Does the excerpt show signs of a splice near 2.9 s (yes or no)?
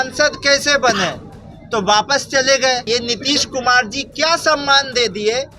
yes